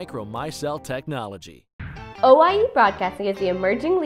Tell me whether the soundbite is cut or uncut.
cut